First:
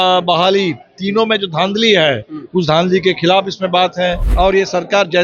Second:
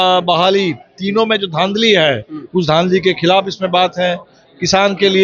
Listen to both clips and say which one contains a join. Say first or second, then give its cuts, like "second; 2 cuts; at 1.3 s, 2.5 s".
first; 1 cut; at 4.2 s